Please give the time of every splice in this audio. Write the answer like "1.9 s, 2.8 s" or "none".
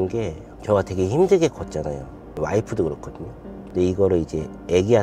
2.4 s